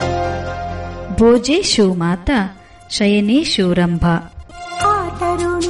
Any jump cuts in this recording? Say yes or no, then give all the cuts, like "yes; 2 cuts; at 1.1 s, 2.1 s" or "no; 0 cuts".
yes; 1 cut; at 0.9 s